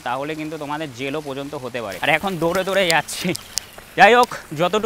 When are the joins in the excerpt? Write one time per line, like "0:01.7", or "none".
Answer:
0:01.9

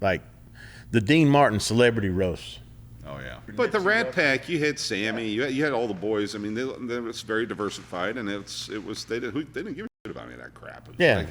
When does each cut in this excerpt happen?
0:03.5

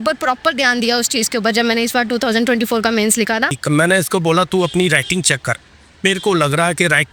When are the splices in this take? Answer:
0:03.6

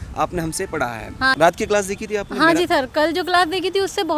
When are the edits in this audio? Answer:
0:01.3

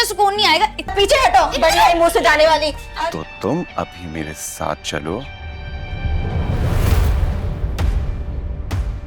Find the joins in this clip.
0:00.9
0:02.8

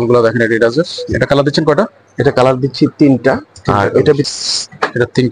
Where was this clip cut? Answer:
0:04.3

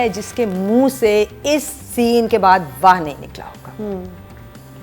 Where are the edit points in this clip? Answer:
none

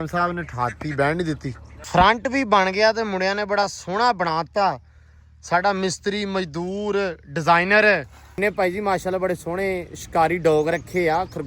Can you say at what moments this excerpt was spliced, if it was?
0:01.9
0:08.4

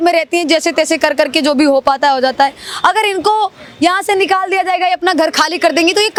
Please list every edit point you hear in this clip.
none

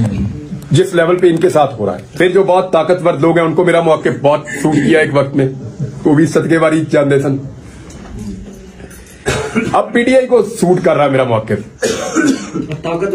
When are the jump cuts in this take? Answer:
0:02.1

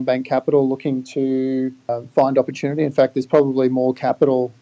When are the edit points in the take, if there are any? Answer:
0:01.9

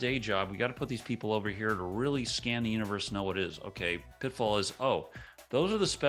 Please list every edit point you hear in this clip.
0:04.1

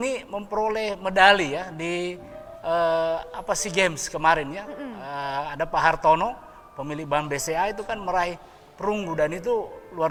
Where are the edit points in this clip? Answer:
none

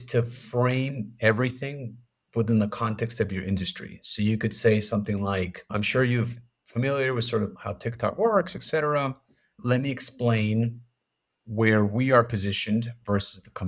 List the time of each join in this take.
0:05.7
0:07.6
0:09.6

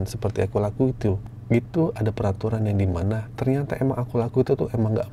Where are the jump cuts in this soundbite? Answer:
0:01.3
0:03.3

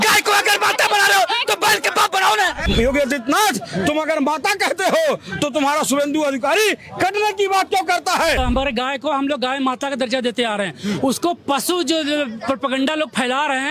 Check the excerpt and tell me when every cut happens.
0:02.7
0:08.4

